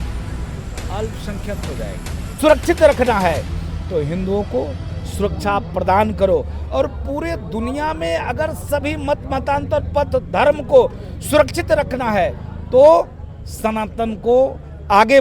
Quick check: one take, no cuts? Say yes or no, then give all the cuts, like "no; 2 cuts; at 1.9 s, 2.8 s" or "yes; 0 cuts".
no; 1 cut; at 2.2 s